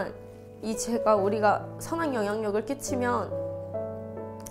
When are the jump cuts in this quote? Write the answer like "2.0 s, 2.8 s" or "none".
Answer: none